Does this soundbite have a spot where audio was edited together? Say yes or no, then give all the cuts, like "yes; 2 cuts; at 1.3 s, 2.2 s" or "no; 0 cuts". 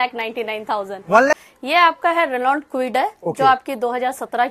yes; 1 cut; at 1.3 s